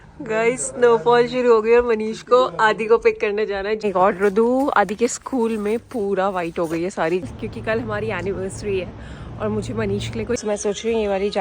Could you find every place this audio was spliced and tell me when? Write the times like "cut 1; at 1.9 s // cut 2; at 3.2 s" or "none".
cut 1; at 3.8 s // cut 2; at 7.3 s // cut 3; at 10.4 s